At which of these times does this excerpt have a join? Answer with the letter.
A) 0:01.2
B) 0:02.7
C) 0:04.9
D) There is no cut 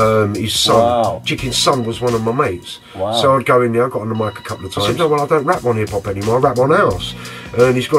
C